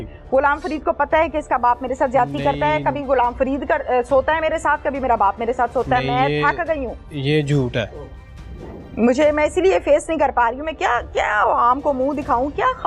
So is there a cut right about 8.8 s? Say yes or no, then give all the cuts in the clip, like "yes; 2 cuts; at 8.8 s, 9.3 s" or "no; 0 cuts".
no; 0 cuts